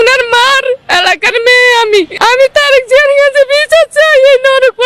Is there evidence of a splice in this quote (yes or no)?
yes